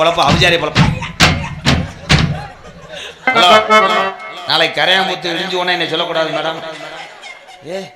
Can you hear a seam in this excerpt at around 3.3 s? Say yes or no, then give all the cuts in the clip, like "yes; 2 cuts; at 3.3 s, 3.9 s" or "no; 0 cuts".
yes; 1 cut; at 3.3 s